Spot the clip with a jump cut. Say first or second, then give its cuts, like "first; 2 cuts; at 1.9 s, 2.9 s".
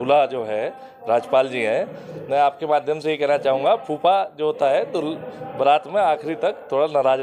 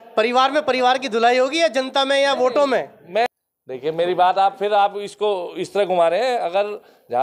second; 1 cut; at 3.3 s